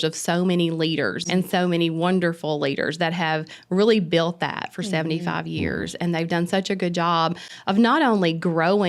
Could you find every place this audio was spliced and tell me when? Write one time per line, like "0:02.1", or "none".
0:01.2